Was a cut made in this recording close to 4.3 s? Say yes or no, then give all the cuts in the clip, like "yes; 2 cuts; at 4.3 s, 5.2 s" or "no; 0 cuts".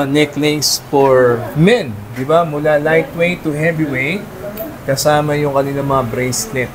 no; 0 cuts